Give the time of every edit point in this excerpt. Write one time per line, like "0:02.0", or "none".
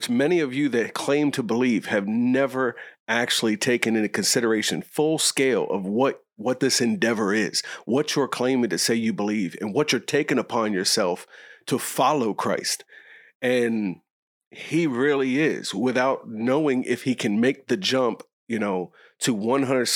none